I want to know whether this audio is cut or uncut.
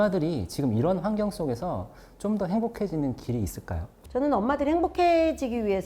cut